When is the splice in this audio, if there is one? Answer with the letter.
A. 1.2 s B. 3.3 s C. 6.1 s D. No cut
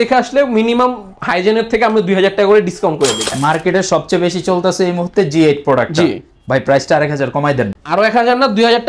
B